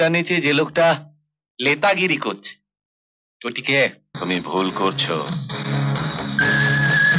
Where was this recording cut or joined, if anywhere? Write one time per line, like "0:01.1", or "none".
0:04.1